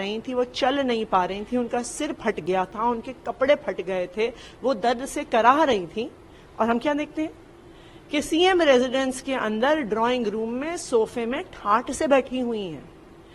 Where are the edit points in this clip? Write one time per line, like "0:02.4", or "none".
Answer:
none